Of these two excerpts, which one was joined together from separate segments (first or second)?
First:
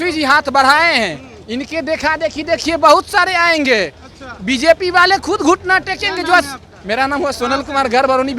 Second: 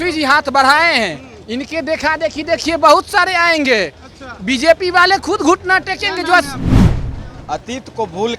second